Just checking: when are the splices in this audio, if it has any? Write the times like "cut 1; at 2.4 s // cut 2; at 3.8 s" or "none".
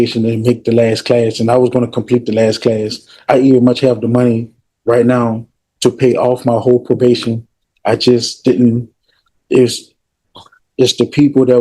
cut 1; at 9.0 s